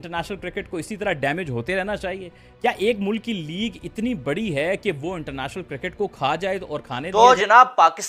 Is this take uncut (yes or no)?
no